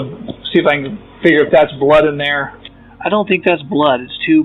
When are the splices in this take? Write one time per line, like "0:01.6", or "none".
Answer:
none